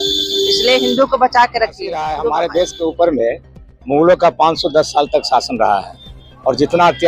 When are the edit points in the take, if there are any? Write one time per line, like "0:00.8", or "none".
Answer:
0:02.2